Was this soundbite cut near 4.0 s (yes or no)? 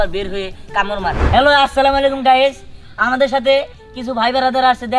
no